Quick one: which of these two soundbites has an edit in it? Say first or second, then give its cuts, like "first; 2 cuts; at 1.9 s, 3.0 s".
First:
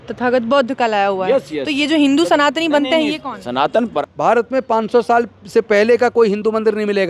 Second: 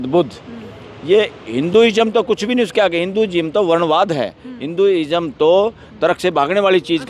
first; 1 cut; at 3.9 s